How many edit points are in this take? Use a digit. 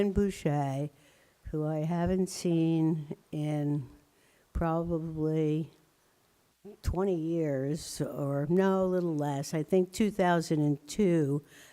1